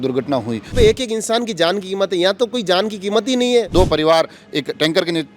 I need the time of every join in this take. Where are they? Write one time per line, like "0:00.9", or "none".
0:00.7
0:03.7